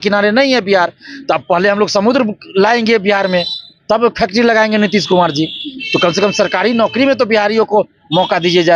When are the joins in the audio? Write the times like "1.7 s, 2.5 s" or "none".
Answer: none